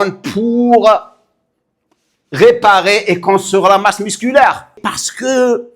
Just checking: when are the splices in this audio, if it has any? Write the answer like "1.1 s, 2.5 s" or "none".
4.8 s